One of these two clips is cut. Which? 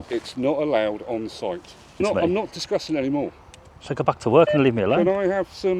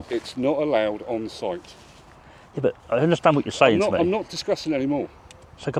first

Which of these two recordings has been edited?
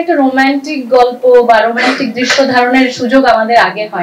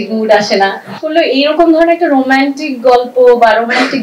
second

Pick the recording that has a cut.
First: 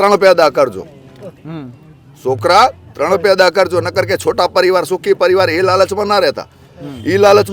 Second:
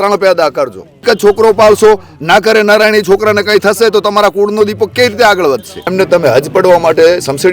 second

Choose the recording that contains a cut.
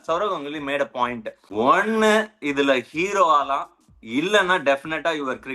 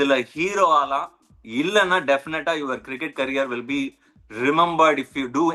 first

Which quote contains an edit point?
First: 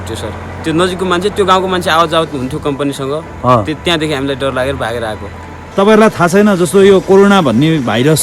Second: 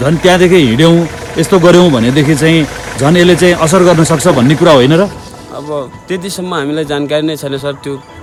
first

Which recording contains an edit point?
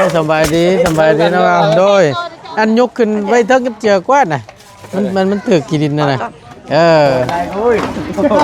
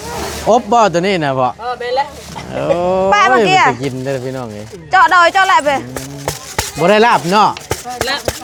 first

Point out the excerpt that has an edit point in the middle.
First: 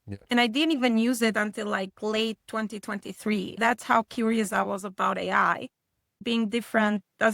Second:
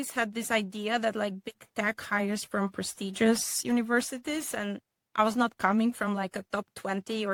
first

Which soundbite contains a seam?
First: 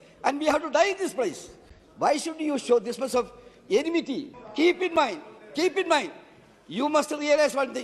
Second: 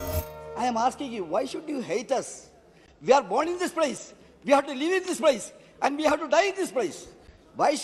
first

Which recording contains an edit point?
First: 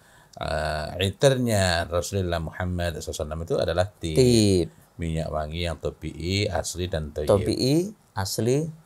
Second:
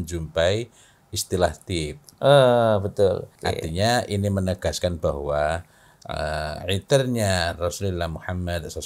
second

